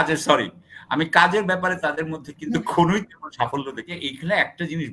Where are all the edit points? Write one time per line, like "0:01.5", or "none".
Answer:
0:03.9